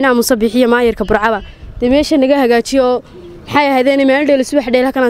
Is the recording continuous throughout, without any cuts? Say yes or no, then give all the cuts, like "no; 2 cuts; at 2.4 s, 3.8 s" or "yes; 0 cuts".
yes; 0 cuts